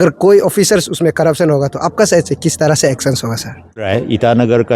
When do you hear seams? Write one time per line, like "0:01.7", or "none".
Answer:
0:03.9